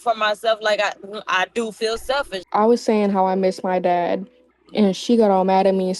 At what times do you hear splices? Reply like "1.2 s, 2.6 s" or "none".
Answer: 2.3 s